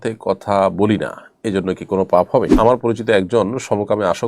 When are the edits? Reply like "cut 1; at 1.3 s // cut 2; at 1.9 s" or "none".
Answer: cut 1; at 2.5 s